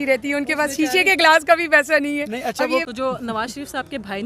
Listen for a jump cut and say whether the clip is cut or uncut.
cut